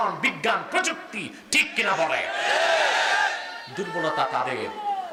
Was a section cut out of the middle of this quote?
no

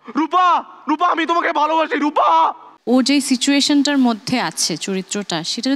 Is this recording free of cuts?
no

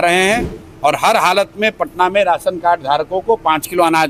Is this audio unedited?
yes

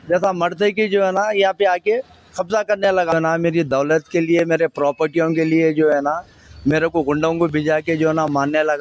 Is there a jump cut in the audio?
yes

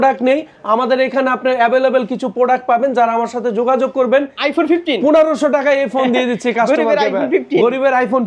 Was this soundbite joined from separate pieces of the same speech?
yes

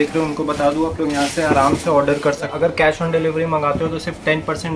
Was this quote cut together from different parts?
yes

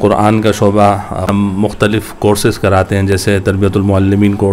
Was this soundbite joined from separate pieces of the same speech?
yes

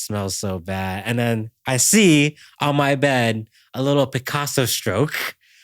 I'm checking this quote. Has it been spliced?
no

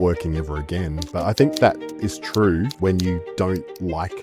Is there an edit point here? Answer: yes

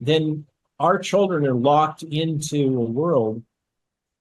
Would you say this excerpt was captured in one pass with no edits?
yes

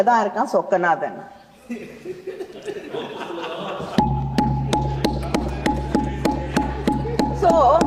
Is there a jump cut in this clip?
no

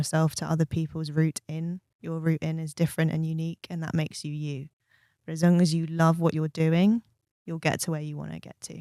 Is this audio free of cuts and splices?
yes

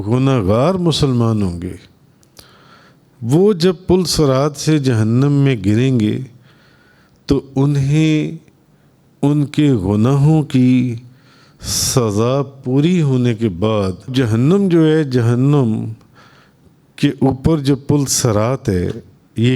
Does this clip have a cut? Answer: yes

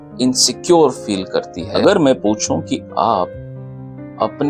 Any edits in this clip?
yes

